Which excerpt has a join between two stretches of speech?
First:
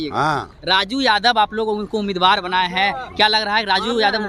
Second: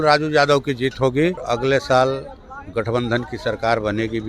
second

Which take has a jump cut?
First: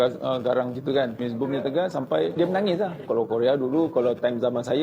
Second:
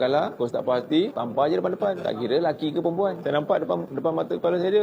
first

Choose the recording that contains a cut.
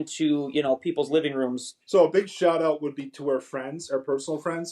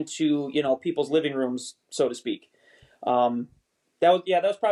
first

